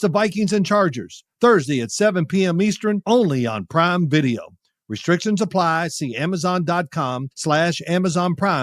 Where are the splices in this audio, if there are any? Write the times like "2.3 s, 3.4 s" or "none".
7.3 s